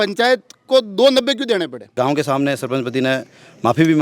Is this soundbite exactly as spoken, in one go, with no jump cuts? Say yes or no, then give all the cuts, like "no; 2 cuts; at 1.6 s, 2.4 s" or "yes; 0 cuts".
no; 1 cut; at 1.9 s